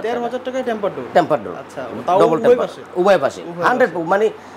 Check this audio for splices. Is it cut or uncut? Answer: uncut